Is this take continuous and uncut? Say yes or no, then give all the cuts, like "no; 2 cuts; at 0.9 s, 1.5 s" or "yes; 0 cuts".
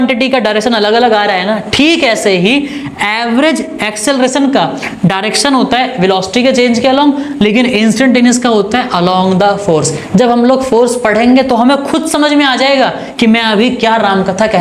yes; 0 cuts